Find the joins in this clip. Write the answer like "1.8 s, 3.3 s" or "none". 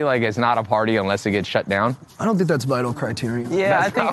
2.1 s